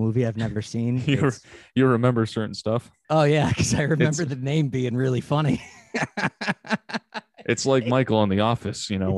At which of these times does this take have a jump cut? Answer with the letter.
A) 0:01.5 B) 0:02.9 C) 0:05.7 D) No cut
B